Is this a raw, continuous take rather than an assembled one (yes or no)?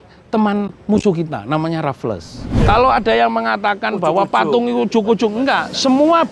no